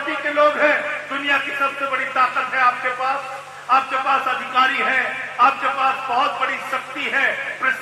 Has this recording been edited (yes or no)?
no